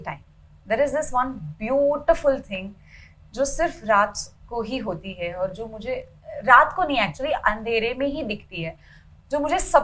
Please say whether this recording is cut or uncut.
uncut